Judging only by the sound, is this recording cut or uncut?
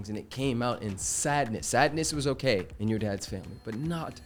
uncut